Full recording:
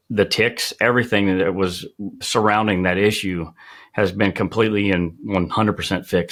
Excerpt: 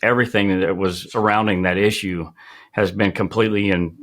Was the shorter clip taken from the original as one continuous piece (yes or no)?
no